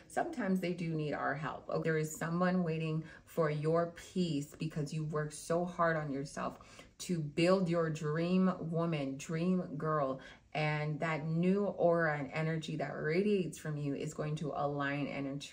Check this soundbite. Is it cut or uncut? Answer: cut